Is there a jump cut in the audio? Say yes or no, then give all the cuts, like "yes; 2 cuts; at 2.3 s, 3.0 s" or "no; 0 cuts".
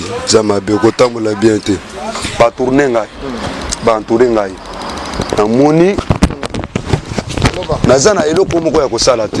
yes; 1 cut; at 2.2 s